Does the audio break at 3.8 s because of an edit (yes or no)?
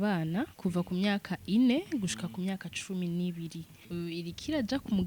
yes